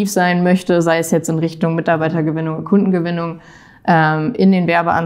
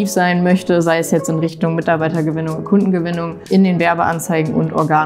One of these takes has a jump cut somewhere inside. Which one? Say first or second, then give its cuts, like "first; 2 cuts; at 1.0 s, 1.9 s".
second; 1 cut; at 3.4 s